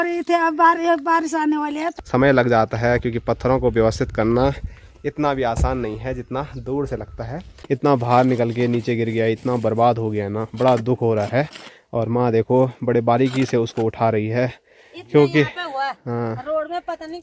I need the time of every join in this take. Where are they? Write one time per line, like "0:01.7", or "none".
0:01.9
0:07.5